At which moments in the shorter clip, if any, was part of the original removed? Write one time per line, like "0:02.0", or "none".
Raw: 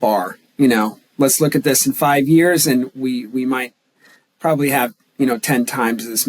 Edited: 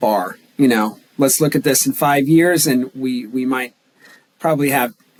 none